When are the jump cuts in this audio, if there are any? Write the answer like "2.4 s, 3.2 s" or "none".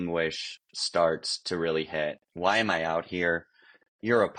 none

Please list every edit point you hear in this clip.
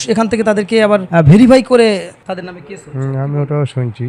1.1 s

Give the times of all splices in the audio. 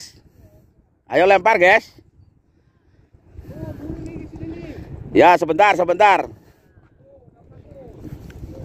none

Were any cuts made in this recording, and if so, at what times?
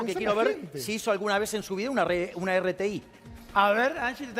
none

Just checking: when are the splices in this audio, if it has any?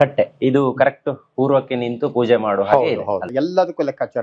3.2 s

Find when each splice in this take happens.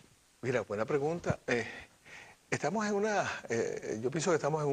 2.7 s

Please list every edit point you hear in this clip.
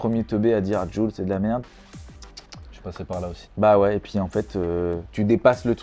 none

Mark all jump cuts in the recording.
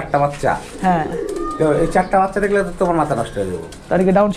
none

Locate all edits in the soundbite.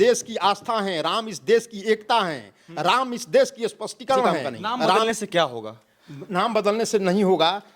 5.0 s

